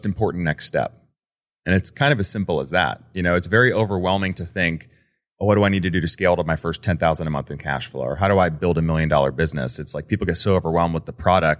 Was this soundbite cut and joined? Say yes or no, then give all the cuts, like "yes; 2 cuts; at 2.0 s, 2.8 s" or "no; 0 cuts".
no; 0 cuts